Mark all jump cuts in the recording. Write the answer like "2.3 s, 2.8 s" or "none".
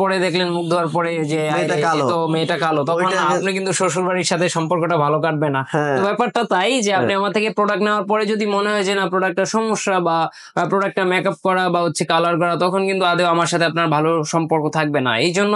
none

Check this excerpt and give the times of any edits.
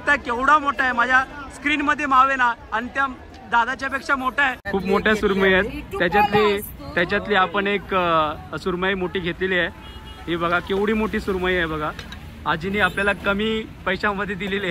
4.6 s

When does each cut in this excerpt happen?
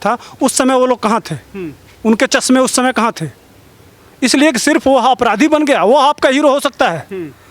none

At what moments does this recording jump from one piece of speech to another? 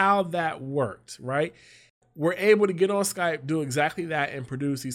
2.0 s

